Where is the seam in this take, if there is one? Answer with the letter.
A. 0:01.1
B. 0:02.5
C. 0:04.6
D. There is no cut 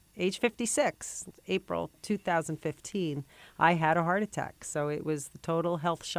D